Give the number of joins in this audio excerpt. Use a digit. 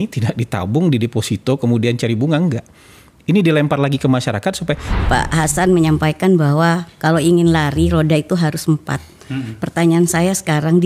1